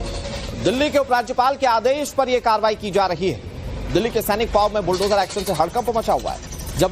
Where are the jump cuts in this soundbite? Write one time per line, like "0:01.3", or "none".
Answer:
0:05.7

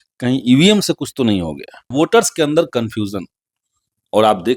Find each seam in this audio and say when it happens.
0:01.9

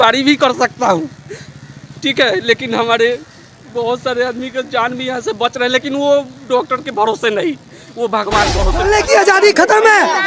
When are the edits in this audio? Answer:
0:08.8

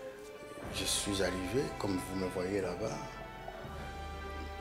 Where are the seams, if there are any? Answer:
none

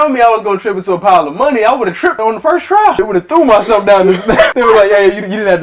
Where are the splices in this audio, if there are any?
0:02.2
0:03.0
0:04.5

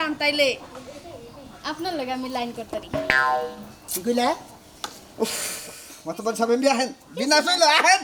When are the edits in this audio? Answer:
none

